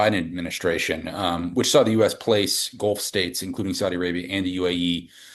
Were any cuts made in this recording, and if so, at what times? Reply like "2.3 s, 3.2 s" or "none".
none

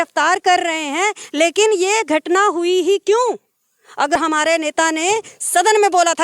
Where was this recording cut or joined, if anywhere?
4.1 s

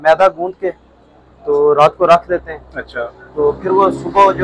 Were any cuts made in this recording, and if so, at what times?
none

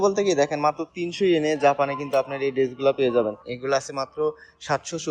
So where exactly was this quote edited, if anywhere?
3.5 s

